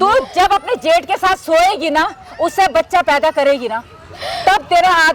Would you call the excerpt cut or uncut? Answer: uncut